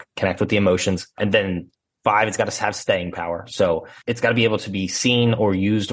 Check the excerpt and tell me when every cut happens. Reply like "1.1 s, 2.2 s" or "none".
1.2 s, 3.9 s